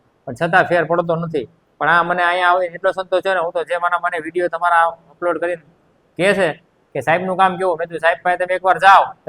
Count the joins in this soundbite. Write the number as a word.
zero